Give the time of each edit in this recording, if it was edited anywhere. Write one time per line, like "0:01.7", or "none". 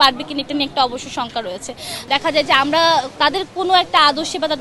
0:01.9
0:03.1